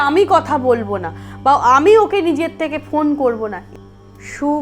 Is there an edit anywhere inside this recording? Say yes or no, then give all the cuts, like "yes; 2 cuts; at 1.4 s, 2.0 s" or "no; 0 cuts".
yes; 1 cut; at 3.7 s